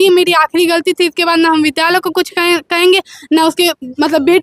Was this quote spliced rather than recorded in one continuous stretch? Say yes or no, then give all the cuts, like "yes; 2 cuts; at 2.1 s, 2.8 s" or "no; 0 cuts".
no; 0 cuts